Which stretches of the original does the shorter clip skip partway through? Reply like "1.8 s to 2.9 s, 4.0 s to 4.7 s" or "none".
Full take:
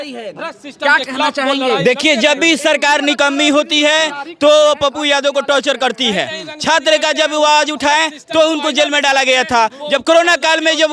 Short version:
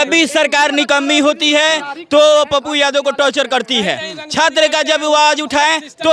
none